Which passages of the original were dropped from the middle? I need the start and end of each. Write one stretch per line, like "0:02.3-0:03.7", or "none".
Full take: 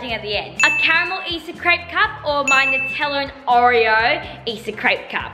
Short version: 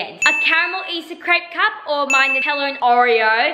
0:03.0-0:03.3